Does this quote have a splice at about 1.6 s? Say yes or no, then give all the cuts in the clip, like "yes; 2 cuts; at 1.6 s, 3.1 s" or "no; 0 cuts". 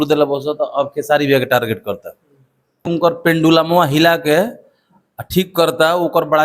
no; 1 cut; at 2.9 s